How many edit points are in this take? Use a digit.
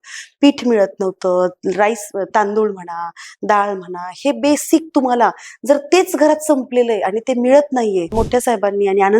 1